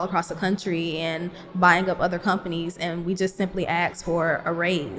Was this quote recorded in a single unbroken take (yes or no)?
yes